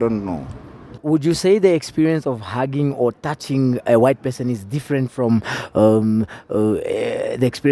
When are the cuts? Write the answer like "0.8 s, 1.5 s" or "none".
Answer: 1.0 s